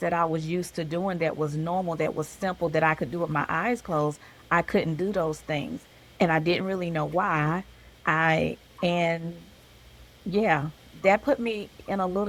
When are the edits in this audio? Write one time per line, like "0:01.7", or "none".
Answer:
none